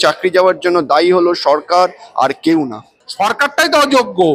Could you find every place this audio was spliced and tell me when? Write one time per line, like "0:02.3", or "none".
0:03.0